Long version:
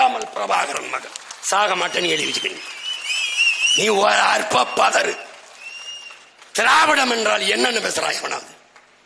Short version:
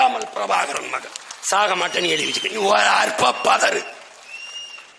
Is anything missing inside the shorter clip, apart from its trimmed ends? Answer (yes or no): yes